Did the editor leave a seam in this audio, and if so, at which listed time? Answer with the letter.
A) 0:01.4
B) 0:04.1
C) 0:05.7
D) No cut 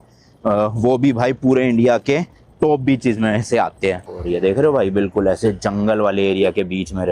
B